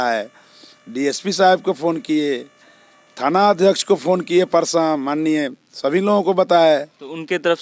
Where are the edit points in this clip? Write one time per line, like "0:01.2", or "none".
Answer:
none